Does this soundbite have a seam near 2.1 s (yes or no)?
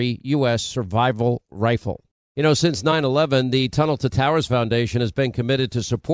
yes